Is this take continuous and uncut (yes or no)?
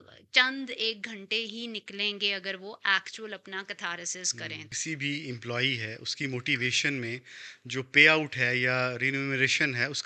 no